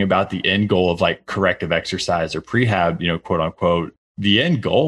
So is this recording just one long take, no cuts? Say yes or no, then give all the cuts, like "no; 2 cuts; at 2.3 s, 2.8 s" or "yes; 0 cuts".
no; 1 cut; at 3.9 s